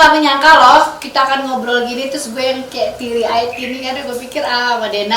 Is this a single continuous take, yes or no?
yes